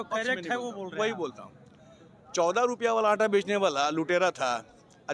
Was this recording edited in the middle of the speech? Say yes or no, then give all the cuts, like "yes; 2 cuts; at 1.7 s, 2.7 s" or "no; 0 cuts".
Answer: no; 0 cuts